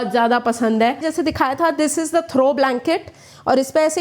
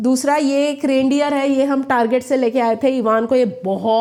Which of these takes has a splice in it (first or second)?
first